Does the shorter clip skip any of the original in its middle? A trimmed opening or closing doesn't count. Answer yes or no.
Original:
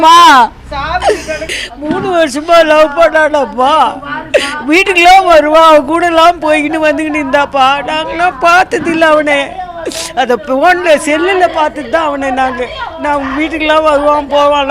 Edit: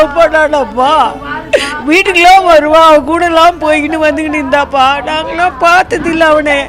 no